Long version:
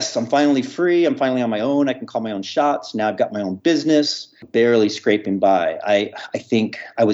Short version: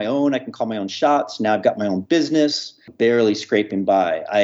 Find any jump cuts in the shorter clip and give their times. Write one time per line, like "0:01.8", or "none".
none